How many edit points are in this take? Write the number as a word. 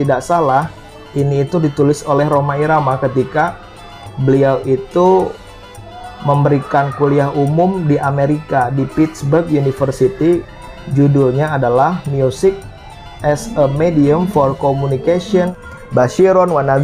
one